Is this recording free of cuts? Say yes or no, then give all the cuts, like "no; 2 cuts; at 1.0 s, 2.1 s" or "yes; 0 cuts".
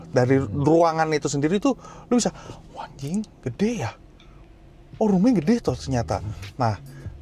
yes; 0 cuts